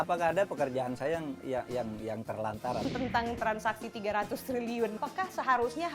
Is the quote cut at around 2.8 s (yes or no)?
yes